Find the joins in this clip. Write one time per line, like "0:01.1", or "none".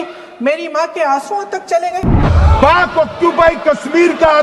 0:02.3